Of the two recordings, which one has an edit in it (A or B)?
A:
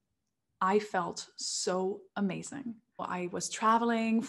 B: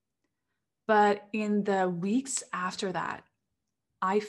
A